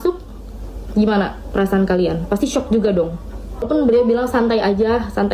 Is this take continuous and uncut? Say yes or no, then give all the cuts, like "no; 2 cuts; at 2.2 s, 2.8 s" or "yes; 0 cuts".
no; 1 cut; at 3.7 s